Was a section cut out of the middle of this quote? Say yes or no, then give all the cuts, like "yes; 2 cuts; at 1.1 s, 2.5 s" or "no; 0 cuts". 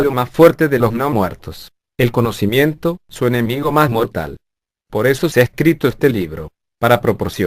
yes; 1 cut; at 4.6 s